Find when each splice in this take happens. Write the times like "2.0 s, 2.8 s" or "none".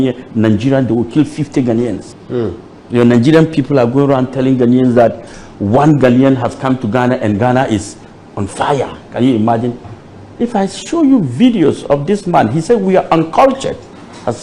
2.1 s